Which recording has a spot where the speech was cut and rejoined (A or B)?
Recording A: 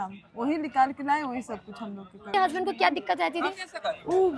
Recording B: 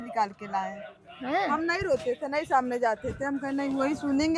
A